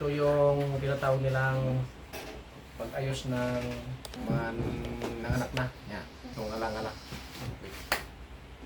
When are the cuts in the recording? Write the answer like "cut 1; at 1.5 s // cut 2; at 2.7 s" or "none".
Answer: cut 1; at 4.1 s // cut 2; at 6.2 s